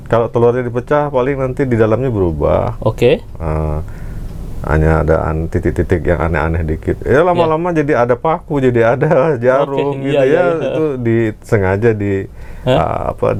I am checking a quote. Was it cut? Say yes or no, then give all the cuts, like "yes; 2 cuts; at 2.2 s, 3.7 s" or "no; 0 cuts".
no; 0 cuts